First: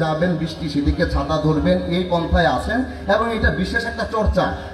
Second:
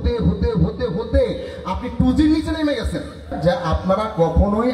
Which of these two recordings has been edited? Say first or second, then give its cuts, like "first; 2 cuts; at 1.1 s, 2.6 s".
second; 1 cut; at 3.3 s